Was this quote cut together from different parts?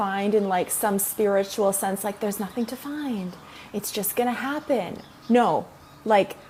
no; 0 cuts

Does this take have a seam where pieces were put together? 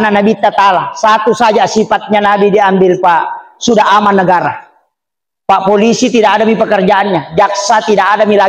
no; 0 cuts

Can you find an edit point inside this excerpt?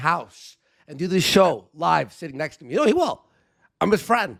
no; 0 cuts

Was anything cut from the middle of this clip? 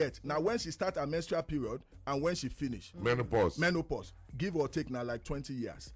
no; 0 cuts

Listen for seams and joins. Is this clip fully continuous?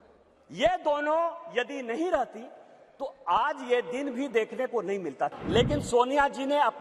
no; 1 cut; at 5.3 s

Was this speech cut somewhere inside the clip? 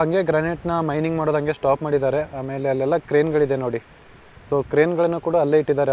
no; 0 cuts

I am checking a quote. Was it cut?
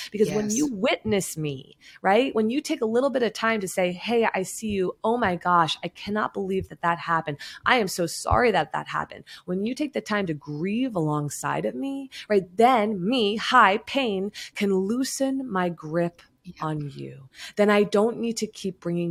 no; 0 cuts

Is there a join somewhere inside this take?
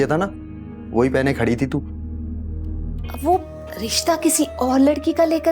yes; 1 cut; at 3.0 s

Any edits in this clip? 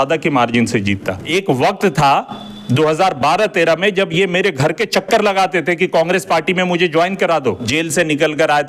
yes; 2 cuts; at 1.2 s, 7.6 s

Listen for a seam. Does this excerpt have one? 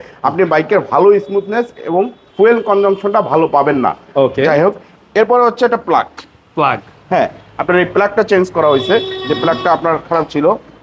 no; 0 cuts

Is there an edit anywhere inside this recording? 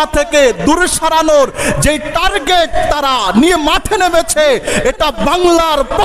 no; 0 cuts

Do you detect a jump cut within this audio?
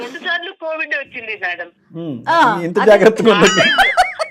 no; 0 cuts

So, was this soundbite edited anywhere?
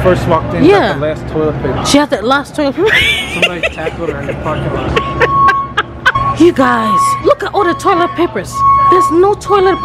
yes; 2 cuts; at 1.8 s, 6.2 s

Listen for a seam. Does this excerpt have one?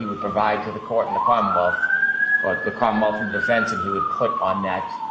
no; 0 cuts

